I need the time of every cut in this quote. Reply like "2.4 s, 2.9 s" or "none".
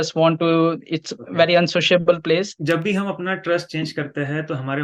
2.5 s